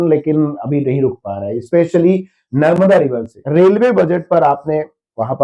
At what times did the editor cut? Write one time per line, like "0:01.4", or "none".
0:03.3